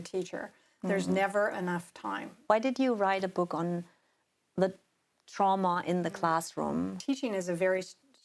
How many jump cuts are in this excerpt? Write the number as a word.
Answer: two